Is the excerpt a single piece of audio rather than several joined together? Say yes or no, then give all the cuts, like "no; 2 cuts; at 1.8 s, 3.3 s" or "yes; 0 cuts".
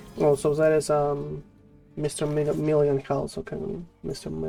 yes; 0 cuts